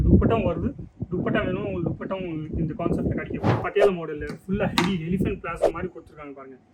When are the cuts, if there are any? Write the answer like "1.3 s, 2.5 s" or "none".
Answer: 3.6 s